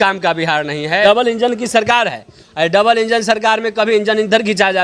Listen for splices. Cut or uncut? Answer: cut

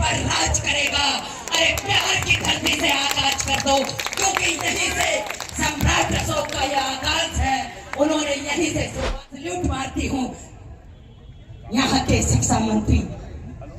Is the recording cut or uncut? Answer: cut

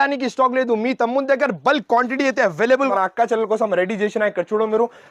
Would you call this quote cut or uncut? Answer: cut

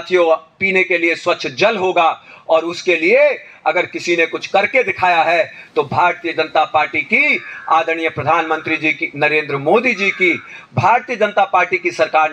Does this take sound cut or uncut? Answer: uncut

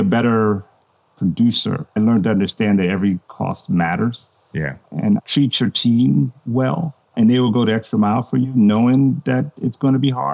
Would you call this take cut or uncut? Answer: cut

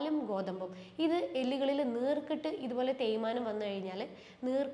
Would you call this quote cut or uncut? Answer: uncut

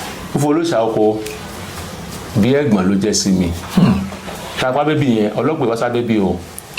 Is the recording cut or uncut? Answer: cut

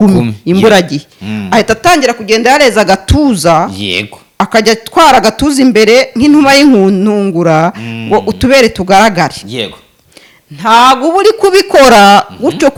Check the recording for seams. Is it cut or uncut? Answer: uncut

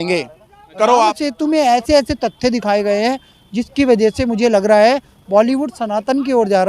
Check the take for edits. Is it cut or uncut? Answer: cut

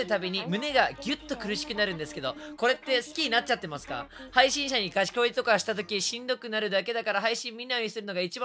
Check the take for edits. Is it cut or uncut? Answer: uncut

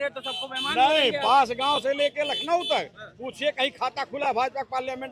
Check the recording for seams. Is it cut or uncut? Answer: uncut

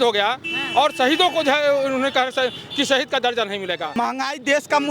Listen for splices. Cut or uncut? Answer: cut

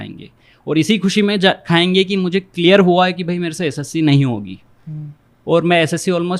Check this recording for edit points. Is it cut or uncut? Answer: uncut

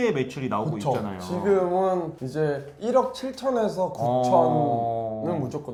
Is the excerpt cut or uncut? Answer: uncut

